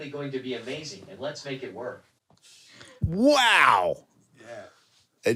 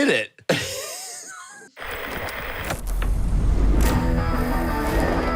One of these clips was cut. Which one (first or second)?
second